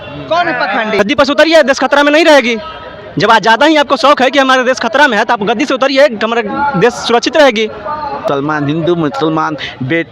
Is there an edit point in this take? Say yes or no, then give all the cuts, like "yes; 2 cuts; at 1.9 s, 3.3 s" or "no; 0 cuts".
yes; 2 cuts; at 1.0 s, 8.3 s